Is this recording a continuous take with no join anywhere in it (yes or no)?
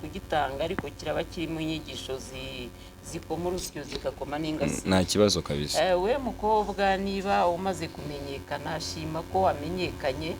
yes